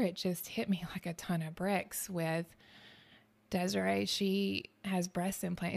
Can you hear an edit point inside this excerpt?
no; 0 cuts

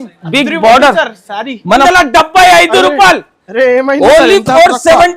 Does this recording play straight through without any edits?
no; 1 cut; at 1.9 s

